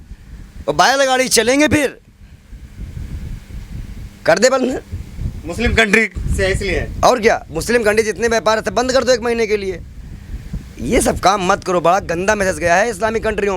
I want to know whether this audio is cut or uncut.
uncut